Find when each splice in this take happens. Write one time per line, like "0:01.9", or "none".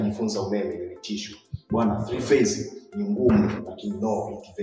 none